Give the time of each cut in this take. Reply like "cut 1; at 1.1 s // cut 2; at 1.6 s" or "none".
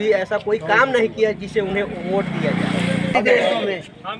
cut 1; at 3.1 s